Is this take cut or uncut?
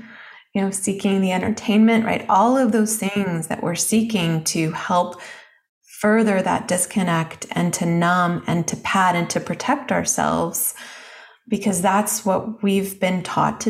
uncut